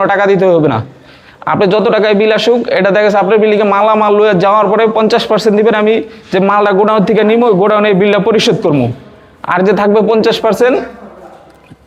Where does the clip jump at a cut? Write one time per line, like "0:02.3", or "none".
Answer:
none